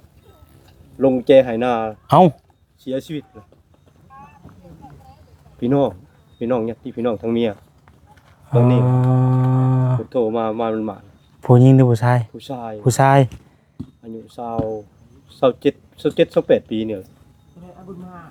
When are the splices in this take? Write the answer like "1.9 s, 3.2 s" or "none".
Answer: none